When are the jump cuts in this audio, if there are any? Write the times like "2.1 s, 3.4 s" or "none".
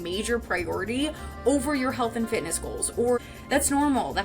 3.2 s